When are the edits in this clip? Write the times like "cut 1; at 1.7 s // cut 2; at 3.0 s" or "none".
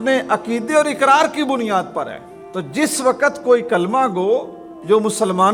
none